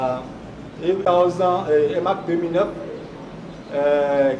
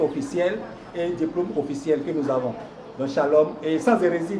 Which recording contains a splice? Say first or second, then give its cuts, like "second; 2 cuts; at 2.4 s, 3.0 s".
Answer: first; 1 cut; at 1.0 s